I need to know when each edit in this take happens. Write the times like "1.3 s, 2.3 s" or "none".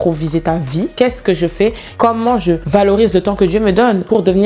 0.9 s